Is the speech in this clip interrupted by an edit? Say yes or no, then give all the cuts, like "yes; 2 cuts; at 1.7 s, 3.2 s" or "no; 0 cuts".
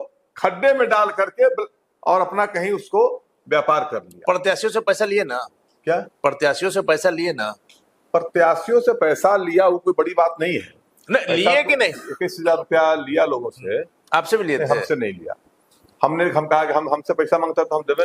no; 0 cuts